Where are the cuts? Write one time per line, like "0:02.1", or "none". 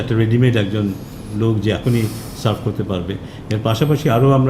none